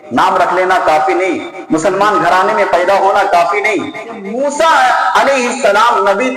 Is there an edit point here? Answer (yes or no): yes